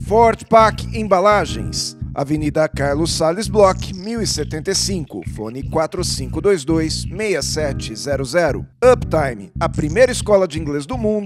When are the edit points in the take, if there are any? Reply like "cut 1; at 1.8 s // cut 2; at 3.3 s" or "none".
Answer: none